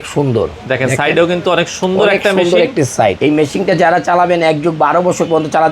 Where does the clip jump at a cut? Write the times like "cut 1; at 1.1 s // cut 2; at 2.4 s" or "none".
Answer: cut 1; at 3.2 s